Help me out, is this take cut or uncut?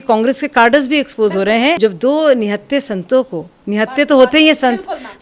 cut